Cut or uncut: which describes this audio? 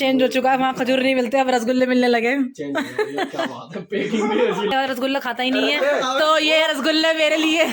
cut